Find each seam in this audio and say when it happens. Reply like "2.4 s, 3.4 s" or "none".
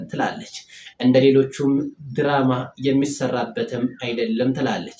none